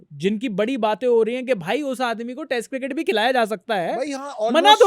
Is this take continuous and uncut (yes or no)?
yes